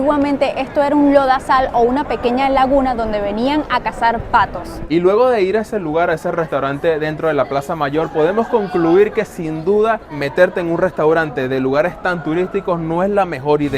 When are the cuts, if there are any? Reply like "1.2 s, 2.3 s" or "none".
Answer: 4.7 s, 10.1 s